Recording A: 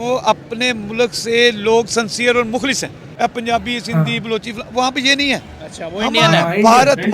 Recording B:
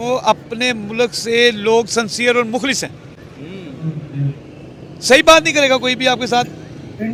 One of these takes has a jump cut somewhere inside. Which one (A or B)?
A